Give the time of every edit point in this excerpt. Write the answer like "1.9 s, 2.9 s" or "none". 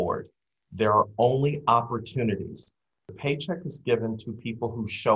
3.1 s